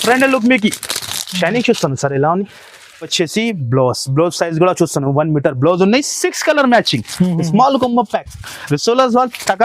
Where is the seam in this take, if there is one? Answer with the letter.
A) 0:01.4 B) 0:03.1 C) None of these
B